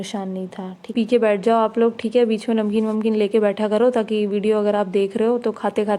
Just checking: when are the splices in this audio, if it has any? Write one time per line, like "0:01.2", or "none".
0:00.9

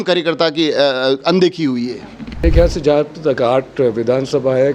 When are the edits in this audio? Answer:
0:02.4

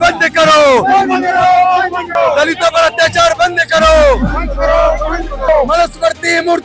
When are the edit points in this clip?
0:02.1
0:05.5

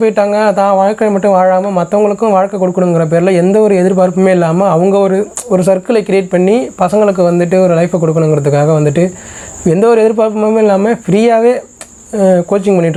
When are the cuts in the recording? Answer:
none

